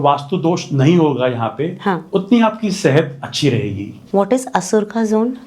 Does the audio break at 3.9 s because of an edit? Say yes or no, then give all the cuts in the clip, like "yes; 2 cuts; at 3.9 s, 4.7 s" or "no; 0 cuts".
yes; 1 cut; at 3.9 s